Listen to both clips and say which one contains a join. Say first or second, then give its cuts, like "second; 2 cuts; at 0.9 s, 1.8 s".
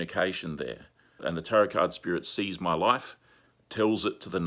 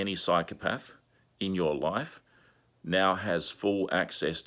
first; 1 cut; at 1.2 s